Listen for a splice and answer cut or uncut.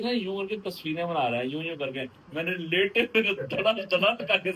uncut